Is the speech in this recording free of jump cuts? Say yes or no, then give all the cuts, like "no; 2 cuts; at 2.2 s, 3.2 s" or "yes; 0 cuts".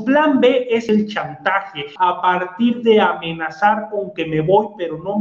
no; 2 cuts; at 0.8 s, 1.9 s